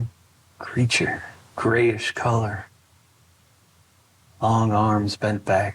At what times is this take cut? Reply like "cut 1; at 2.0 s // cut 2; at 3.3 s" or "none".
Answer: cut 1; at 1.4 s